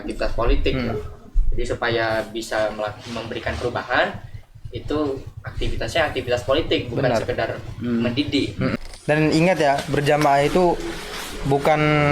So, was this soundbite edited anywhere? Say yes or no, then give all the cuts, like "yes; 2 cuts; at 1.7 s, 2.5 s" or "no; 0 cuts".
yes; 1 cut; at 8.8 s